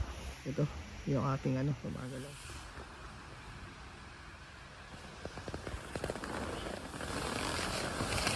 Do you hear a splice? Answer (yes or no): yes